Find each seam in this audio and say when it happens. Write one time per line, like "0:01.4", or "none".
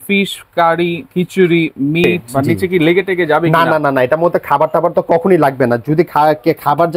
0:02.2